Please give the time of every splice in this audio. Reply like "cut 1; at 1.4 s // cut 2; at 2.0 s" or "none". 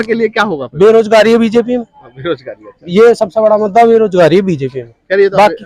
none